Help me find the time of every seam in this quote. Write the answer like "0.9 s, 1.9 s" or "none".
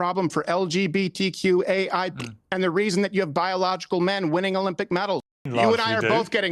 5.3 s